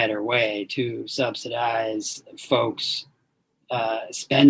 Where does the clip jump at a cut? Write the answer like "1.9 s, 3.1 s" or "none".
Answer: none